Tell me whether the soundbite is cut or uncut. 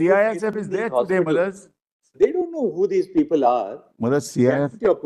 uncut